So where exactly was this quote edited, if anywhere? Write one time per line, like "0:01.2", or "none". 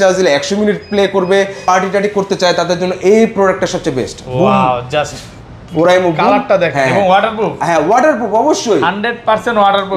0:01.6

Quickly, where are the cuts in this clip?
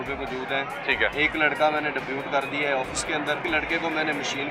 0:03.4

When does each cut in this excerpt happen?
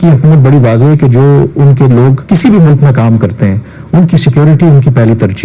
0:02.2

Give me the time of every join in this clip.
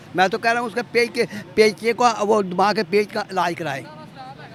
none

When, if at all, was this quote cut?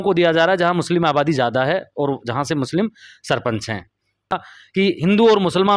0:04.5

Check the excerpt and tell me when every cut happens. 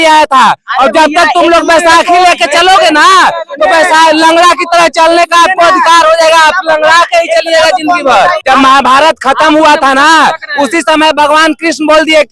0:08.4

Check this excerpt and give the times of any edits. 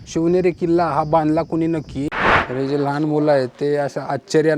0:02.2

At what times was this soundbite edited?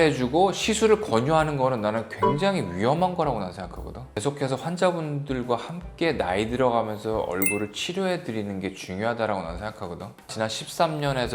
0:04.1
0:10.3

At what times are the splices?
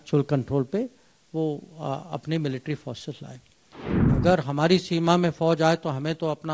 0:04.1

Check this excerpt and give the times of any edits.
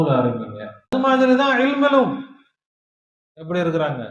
0:00.9

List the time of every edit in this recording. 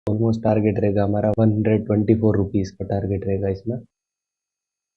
0:01.4

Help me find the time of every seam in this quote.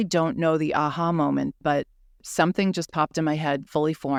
none

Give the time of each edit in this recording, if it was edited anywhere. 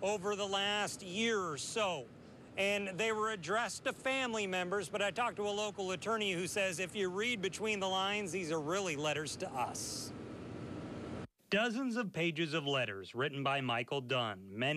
0:04.1

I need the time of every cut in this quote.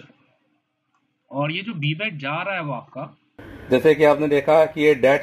0:03.4

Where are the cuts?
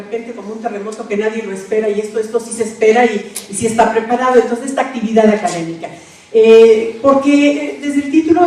none

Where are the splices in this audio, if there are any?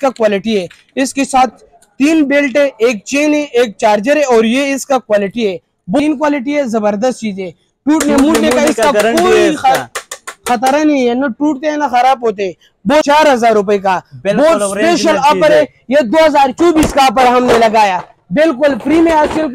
0:06.0
0:13.0

